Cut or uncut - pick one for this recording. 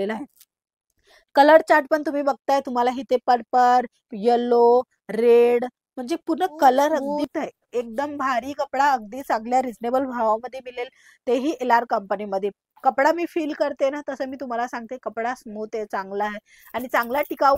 cut